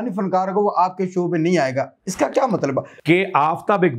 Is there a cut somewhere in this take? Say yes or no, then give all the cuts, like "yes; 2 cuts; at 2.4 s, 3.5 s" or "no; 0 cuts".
yes; 1 cut; at 2.9 s